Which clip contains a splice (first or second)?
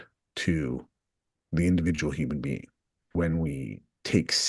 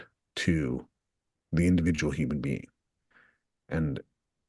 first